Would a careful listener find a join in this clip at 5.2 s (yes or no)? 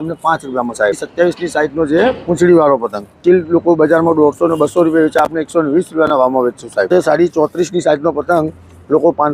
no